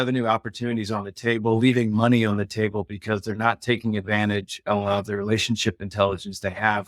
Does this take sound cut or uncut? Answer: uncut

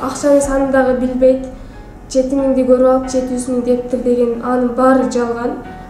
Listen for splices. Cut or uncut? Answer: uncut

